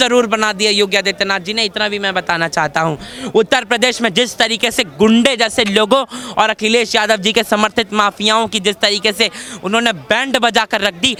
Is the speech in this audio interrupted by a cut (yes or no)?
no